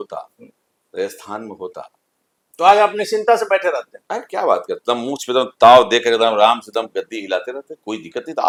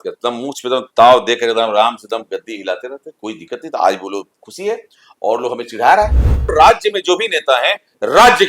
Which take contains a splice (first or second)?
second